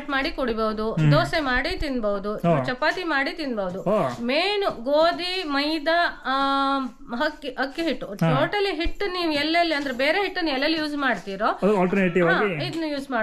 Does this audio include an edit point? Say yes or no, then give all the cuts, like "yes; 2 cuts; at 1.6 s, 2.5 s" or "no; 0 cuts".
no; 0 cuts